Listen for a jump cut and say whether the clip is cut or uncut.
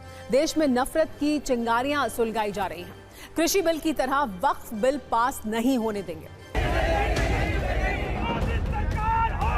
cut